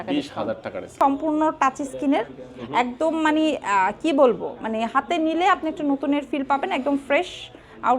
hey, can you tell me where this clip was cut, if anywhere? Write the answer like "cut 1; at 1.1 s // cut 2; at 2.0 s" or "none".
cut 1; at 0.9 s